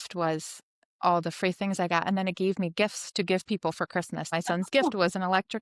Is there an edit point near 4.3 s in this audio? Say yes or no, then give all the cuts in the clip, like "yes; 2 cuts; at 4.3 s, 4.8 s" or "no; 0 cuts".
yes; 1 cut; at 4.3 s